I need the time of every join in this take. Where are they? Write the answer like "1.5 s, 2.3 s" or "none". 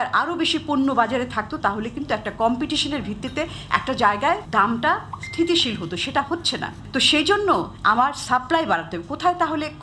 4.4 s, 6.8 s, 7.7 s